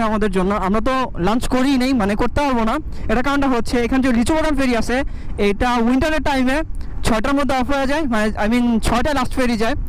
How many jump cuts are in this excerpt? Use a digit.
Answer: 0